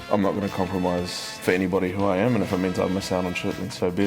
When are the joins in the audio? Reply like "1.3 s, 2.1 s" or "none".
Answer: 1.4 s